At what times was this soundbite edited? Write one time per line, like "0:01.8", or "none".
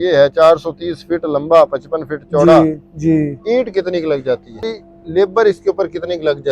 0:04.7